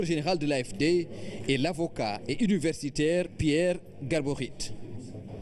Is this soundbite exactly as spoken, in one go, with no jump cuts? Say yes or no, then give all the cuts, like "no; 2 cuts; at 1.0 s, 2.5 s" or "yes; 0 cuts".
yes; 0 cuts